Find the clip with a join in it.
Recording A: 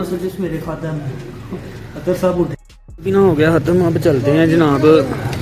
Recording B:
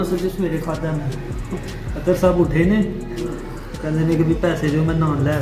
A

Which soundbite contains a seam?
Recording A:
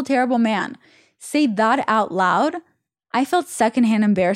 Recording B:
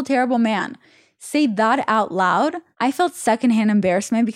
B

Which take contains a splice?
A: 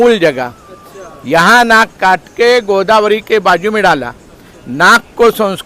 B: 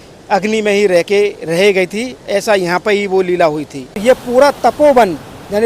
B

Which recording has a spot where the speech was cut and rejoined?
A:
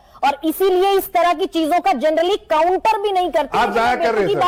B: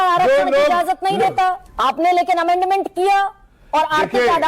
B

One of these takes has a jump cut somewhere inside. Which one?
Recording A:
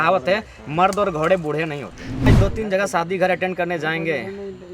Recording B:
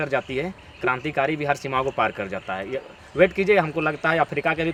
A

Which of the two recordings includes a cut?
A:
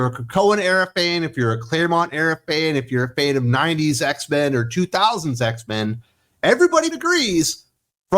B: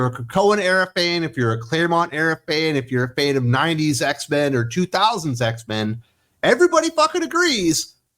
A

